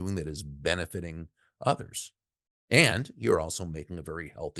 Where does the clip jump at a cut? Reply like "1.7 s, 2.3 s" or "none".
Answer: none